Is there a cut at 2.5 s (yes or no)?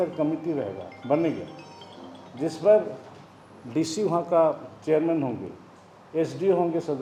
no